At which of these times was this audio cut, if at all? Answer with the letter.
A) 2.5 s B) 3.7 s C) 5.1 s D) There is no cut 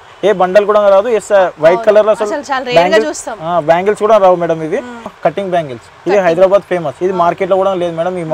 C